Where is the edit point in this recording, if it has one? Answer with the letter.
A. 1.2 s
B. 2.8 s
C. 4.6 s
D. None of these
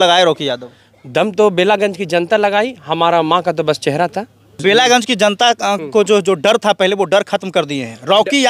C